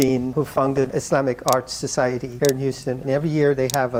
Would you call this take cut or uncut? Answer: uncut